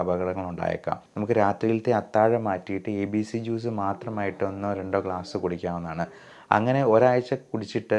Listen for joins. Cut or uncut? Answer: cut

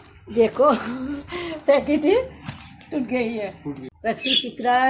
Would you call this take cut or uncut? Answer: cut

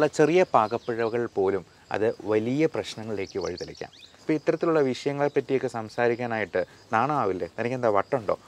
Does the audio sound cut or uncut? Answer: cut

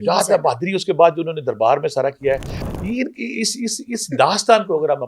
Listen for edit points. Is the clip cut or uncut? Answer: uncut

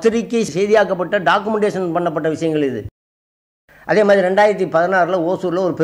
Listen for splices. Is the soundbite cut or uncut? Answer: cut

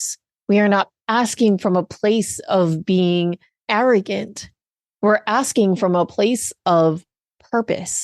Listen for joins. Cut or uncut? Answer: cut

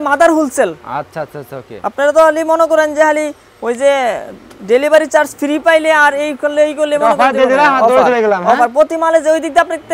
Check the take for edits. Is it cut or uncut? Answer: uncut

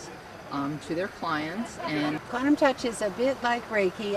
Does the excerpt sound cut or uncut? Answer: cut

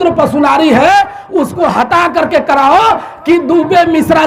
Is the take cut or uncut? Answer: uncut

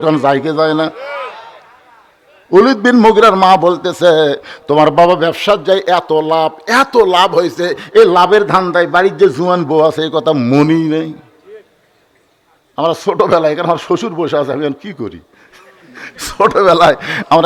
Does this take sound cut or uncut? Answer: uncut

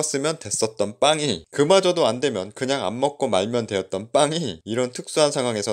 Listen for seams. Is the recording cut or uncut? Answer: uncut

